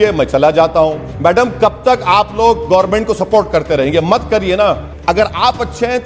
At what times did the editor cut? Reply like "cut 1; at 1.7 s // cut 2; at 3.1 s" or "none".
cut 1; at 1.1 s // cut 2; at 4.9 s

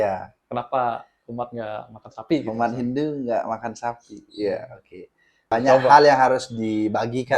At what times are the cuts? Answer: cut 1; at 5.5 s

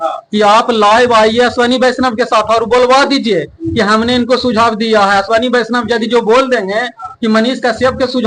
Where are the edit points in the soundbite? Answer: none

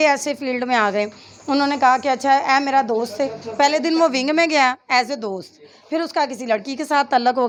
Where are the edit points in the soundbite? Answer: none

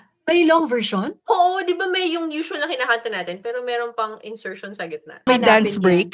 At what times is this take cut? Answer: cut 1; at 5.2 s

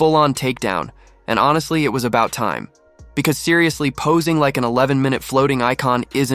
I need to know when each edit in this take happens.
none

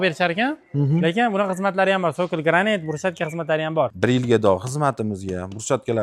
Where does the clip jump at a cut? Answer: cut 1; at 3.9 s

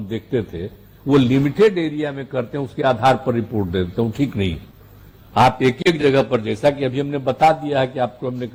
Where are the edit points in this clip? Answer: none

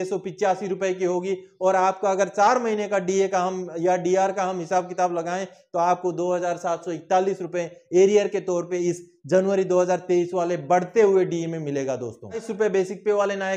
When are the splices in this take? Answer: cut 1; at 12.5 s

